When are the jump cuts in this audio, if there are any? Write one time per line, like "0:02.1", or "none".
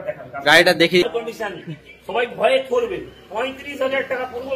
0:01.1